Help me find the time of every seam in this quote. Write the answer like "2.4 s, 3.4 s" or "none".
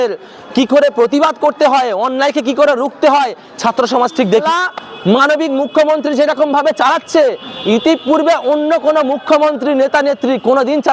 4.4 s